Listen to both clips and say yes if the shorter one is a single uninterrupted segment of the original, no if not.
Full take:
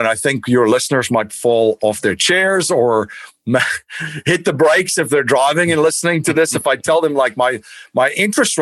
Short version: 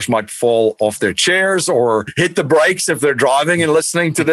no